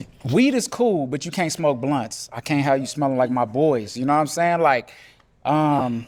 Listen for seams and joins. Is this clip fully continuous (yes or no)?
yes